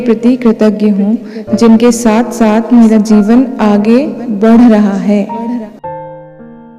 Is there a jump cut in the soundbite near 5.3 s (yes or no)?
yes